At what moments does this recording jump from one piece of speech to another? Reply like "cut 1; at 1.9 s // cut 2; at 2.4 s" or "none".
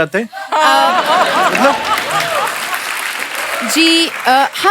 none